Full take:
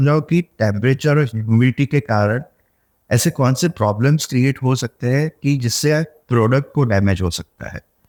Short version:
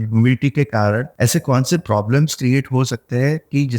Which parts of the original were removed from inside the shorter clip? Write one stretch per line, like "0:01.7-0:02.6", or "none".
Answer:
0:02.5-0:03.0